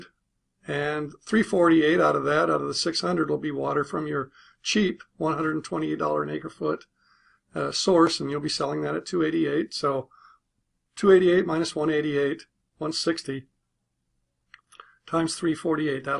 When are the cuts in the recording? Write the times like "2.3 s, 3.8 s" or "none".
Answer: 7.5 s